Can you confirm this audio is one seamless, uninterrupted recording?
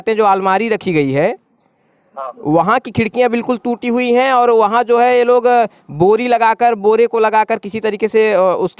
yes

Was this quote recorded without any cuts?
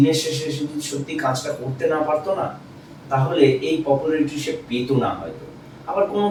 yes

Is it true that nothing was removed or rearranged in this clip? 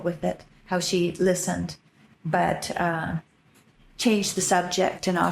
yes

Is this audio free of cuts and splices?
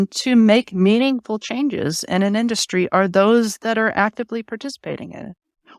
yes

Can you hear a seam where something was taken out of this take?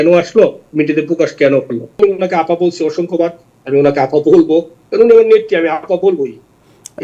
yes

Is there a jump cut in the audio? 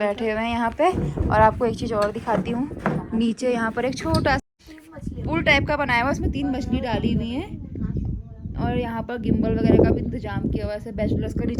no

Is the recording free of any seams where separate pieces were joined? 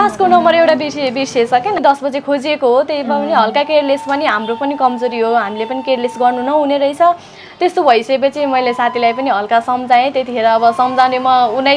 no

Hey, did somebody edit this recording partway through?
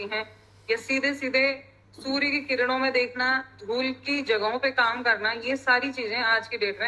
no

